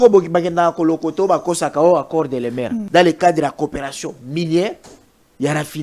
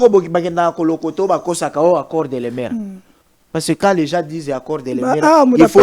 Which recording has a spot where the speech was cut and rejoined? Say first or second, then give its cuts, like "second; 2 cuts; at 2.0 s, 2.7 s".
first; 1 cut; at 2.8 s